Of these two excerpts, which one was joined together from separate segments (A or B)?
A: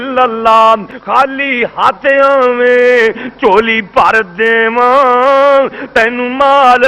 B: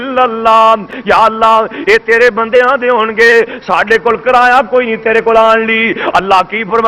A